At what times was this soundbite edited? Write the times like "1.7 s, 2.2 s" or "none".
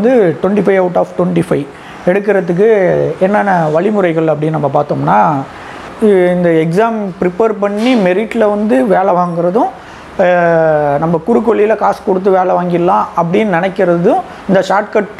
5.9 s